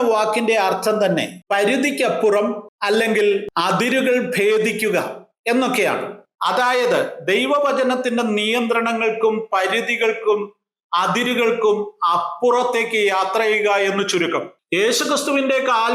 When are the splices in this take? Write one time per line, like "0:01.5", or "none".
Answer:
0:01.4
0:02.7
0:03.5
0:14.6